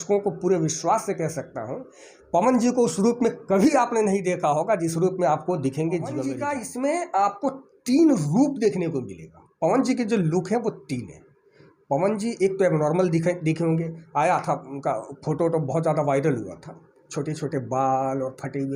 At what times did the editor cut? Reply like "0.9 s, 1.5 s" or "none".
6.4 s